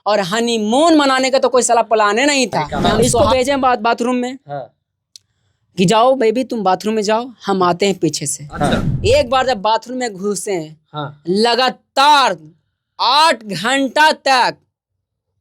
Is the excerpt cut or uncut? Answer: cut